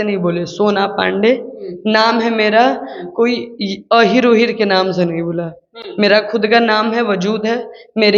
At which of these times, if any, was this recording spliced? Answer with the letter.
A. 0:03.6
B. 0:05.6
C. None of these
C